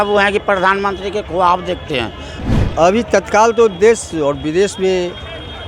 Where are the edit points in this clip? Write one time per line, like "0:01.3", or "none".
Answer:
0:02.2